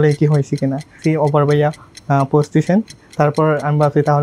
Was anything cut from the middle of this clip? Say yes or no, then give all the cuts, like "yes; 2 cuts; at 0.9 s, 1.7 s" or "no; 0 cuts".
yes; 1 cut; at 1.0 s